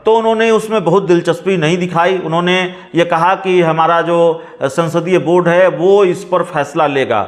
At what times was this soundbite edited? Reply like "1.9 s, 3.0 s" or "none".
none